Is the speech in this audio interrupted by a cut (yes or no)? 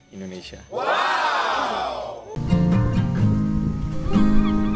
no